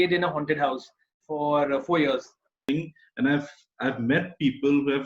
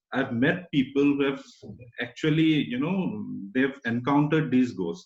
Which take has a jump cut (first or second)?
first